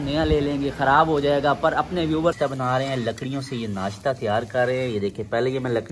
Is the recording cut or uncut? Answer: cut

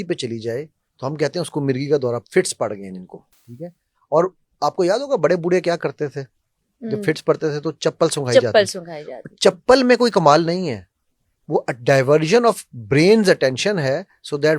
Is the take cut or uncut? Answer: uncut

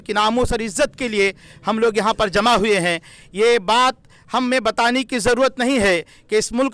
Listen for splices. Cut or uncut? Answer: uncut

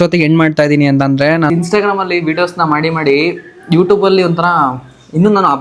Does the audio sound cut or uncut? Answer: cut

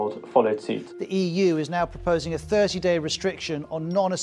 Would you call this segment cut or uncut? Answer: uncut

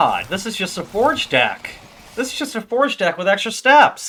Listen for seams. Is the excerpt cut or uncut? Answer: uncut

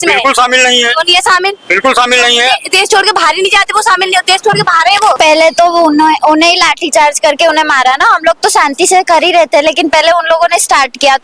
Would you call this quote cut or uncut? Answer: cut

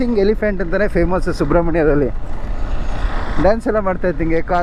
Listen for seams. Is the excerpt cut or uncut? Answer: uncut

